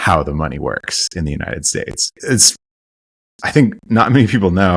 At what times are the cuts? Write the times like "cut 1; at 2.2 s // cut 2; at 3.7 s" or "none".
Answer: cut 1; at 2.1 s